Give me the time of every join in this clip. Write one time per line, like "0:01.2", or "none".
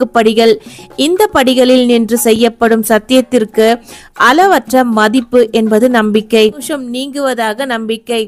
0:06.7